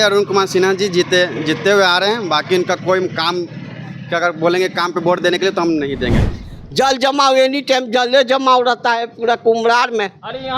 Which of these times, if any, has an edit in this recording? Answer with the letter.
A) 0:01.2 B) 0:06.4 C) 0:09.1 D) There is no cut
B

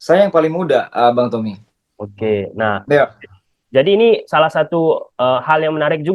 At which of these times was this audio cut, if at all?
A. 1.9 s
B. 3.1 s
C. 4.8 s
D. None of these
D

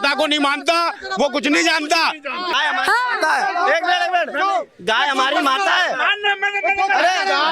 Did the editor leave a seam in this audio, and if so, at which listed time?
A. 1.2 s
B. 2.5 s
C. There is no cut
B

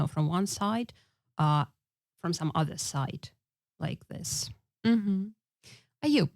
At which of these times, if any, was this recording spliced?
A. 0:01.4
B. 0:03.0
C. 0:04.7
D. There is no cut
D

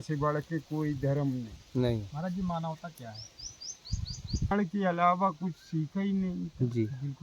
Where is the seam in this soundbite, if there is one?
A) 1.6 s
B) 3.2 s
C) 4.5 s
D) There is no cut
C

